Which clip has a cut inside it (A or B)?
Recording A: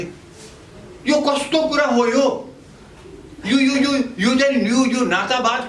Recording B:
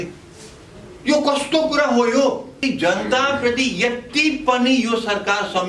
B